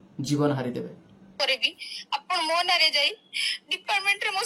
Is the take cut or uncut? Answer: cut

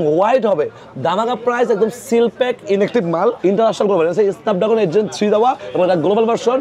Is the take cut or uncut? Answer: cut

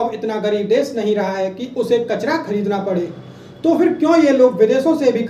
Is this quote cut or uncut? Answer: uncut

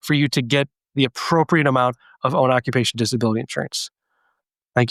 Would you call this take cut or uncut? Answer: uncut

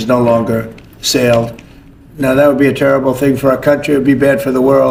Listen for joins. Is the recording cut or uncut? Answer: uncut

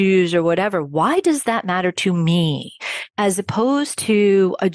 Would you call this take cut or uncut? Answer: cut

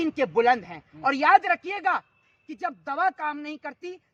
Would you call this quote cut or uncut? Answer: uncut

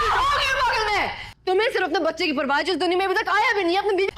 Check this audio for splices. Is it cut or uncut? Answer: uncut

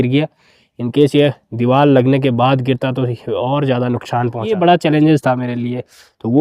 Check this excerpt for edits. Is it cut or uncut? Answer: cut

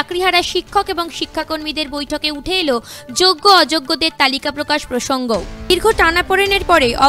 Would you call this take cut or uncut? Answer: uncut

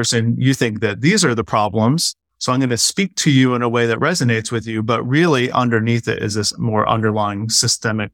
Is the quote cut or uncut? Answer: uncut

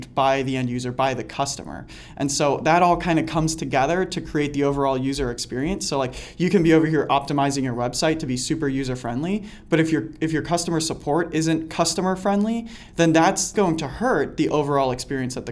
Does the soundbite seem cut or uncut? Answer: cut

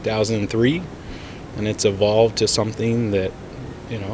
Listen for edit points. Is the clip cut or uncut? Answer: uncut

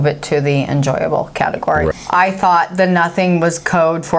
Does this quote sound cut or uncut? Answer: cut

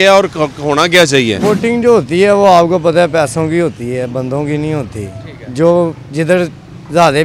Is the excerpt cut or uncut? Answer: cut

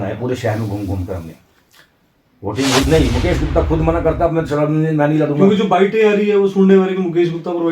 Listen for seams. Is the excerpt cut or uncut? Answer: cut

